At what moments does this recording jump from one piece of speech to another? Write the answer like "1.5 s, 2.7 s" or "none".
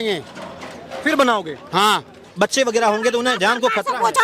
2.2 s

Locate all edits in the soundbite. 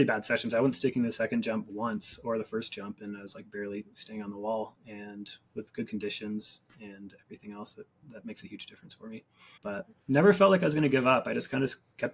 8.0 s, 9.4 s

